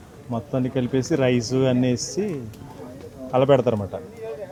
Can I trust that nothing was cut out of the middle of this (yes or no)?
yes